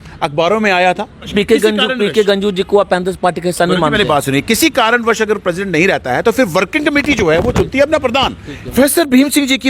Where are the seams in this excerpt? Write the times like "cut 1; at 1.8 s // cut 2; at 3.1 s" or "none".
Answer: cut 1; at 1.3 s // cut 2; at 8.7 s